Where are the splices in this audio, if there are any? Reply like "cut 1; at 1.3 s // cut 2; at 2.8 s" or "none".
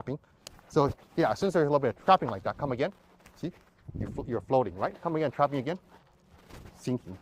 none